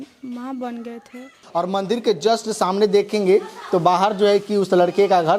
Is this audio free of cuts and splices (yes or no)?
no